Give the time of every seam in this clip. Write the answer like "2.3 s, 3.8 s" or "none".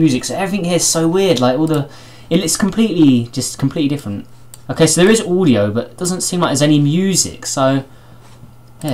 6.5 s